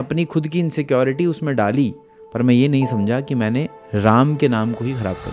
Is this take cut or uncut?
uncut